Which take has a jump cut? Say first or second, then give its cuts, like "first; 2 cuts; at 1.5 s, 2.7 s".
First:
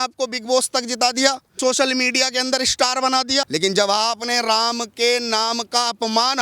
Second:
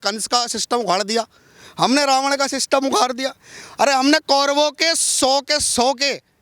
first; 2 cuts; at 1.6 s, 3.5 s